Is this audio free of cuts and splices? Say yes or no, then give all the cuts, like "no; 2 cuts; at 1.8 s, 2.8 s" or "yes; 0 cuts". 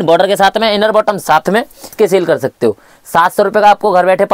no; 1 cut; at 1.8 s